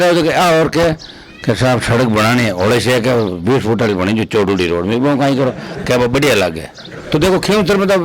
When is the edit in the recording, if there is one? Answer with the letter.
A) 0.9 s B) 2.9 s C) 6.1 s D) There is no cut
A